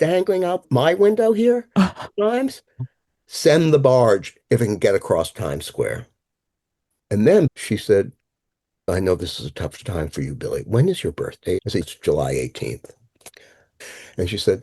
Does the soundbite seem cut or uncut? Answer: cut